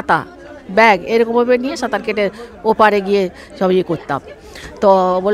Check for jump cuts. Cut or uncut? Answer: uncut